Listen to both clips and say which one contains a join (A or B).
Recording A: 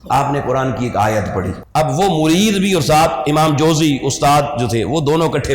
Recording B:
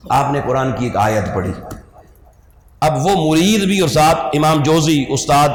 A